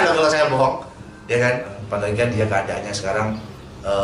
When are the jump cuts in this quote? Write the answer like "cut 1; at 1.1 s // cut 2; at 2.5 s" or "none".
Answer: cut 1; at 1.8 s

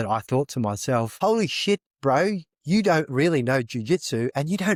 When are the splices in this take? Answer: none

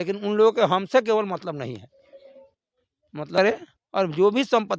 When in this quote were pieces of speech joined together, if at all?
cut 1; at 3.4 s

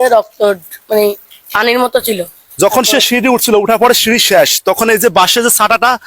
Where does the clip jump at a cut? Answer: cut 1; at 2.4 s

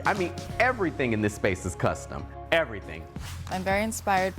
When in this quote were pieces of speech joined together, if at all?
cut 1; at 3.1 s

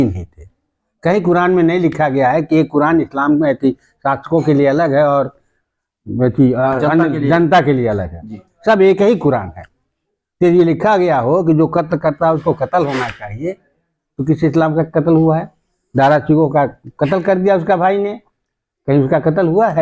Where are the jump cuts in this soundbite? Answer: none

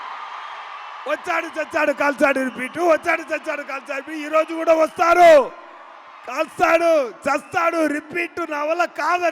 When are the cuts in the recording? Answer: none

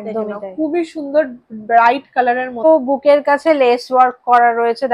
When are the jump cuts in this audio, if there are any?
cut 1; at 2.6 s

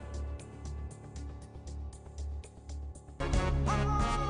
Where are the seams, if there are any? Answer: none

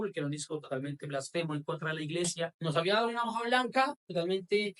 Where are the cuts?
cut 1; at 2.6 s

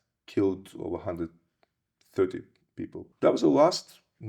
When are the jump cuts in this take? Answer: cut 1; at 3.0 s

